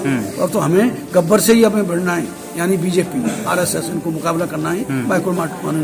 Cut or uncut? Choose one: uncut